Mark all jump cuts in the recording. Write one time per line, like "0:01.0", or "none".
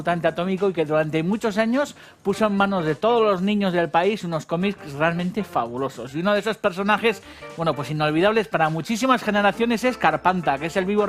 0:03.4